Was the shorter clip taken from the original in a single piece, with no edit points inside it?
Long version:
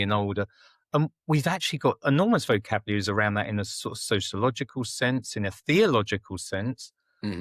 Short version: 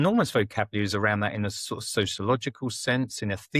yes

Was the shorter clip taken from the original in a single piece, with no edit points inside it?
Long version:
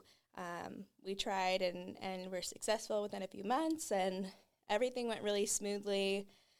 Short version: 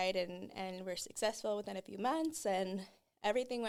yes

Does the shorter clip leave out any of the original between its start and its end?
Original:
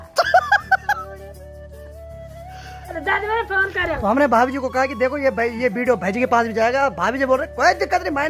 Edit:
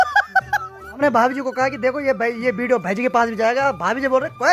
yes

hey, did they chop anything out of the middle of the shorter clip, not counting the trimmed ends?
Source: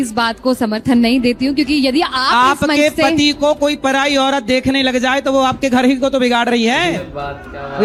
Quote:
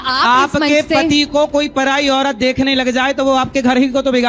no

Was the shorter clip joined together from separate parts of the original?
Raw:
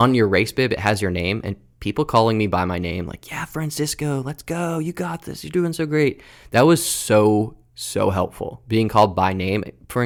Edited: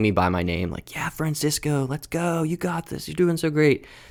no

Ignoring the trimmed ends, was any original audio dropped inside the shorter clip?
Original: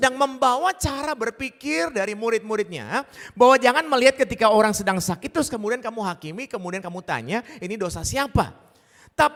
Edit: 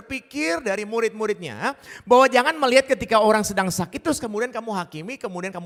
no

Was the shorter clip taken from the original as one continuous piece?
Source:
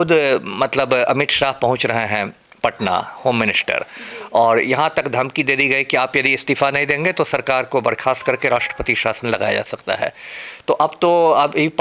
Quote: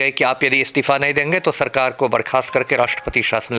yes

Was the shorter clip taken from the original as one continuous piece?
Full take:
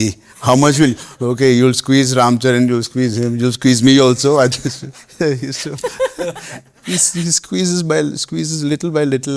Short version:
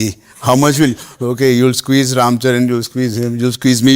yes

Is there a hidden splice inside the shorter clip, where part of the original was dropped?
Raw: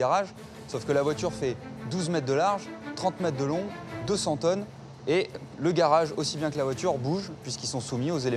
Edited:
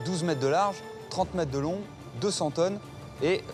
no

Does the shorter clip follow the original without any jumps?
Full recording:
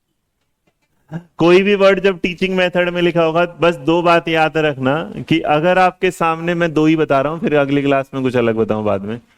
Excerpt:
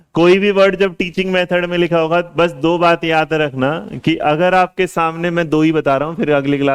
yes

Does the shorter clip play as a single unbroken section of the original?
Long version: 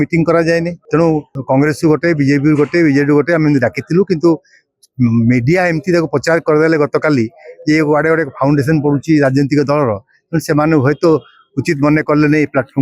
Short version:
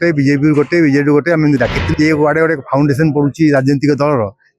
no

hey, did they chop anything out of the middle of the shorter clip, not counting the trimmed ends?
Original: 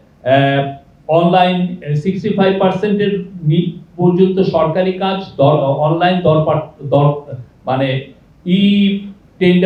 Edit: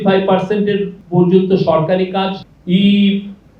yes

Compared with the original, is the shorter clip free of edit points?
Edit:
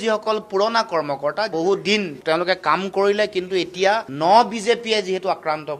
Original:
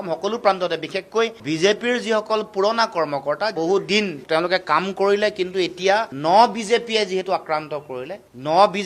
yes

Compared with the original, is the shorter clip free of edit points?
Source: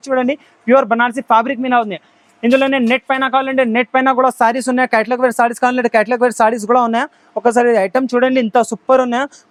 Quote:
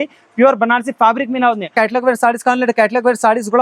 no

